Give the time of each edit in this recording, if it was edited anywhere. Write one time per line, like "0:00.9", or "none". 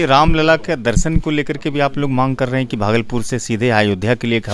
none